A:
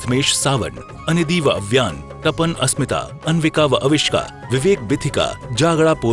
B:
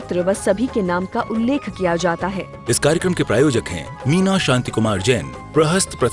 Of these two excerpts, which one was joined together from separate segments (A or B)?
B